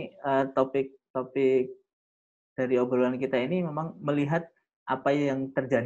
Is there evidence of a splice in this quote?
no; 0 cuts

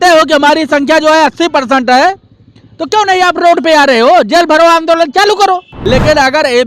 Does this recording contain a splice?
yes; 1 cut; at 5.7 s

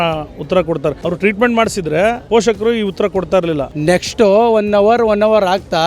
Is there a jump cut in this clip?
yes; 3 cuts; at 1.0 s, 2.2 s, 3.7 s

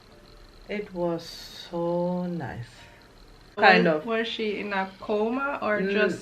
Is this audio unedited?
no; 1 cut; at 3.6 s

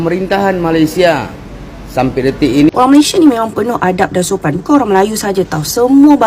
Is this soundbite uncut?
no; 1 cut; at 2.7 s

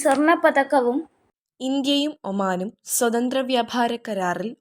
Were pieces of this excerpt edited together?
yes; 1 cut; at 1.2 s

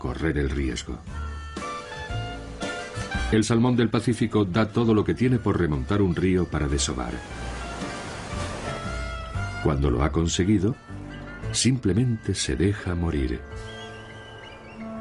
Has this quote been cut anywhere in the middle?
yes; 1 cut; at 5.5 s

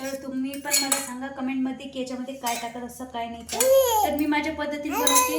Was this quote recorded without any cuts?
yes; 0 cuts

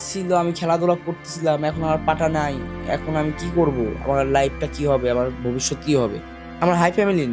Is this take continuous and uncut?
yes; 0 cuts

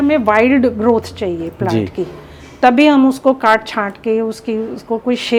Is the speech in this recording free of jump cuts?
yes; 0 cuts

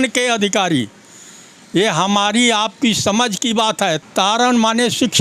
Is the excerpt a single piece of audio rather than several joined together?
no; 1 cut; at 4.0 s

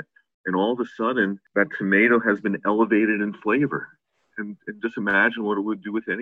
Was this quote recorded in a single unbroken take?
no; 1 cut; at 1.4 s

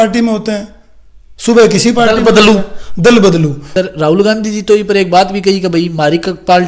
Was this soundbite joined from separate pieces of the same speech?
yes; 1 cut; at 3.7 s

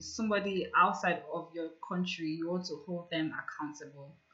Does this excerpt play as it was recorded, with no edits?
yes; 0 cuts

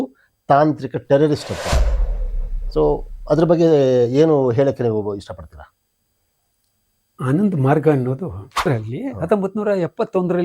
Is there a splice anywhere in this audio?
yes; 1 cut; at 8.7 s

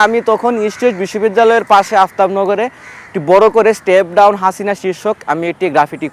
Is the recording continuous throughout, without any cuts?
yes; 0 cuts

